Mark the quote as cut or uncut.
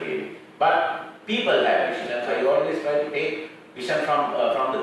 cut